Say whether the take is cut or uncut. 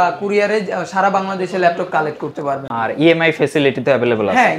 uncut